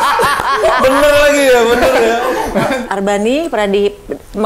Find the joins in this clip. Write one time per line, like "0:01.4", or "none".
0:02.8

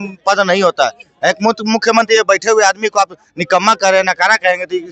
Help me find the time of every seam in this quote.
none

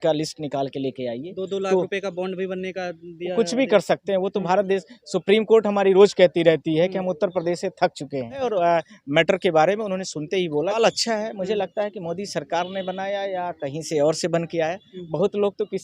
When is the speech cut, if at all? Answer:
0:08.4
0:10.7

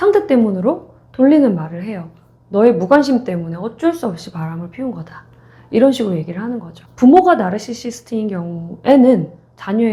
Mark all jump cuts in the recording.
none

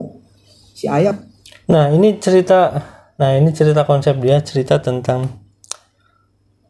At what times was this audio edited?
none

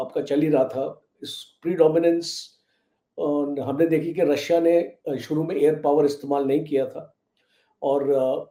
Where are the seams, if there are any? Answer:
none

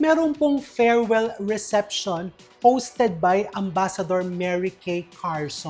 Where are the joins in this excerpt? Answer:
none

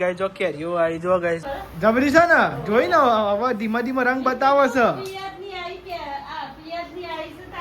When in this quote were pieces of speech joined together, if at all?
0:01.5

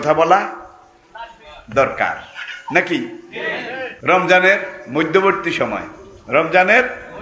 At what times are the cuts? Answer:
0:03.9

